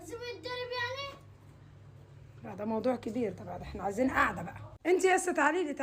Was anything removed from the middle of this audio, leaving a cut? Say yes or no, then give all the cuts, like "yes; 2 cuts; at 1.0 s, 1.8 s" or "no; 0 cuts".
yes; 1 cut; at 4.7 s